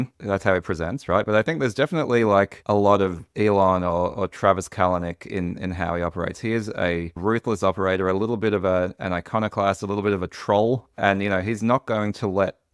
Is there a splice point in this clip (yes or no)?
no